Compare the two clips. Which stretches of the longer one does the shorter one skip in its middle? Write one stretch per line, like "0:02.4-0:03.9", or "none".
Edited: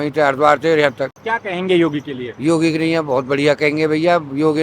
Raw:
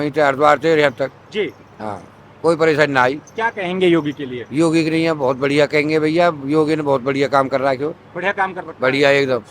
0:01.2-0:03.3